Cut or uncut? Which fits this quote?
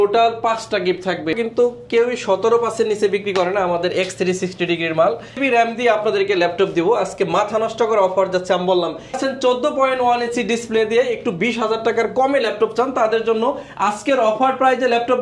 cut